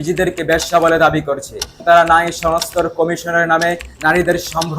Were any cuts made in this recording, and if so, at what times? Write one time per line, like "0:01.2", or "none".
0:01.8